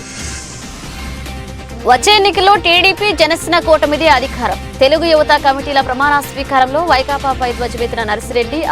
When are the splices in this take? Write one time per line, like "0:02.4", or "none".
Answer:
0:00.9